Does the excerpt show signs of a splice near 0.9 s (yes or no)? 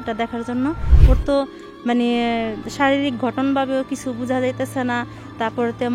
yes